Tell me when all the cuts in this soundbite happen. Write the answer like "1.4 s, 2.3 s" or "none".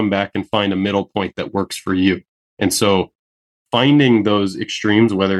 3.2 s